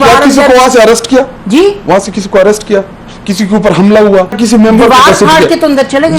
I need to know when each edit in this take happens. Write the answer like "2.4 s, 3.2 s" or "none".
4.4 s